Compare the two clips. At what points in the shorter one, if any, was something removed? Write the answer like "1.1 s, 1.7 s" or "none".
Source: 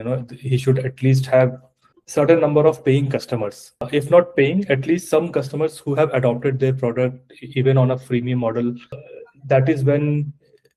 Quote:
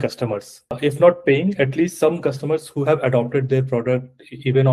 none